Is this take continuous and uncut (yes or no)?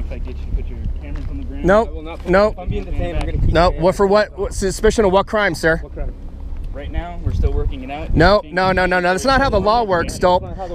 yes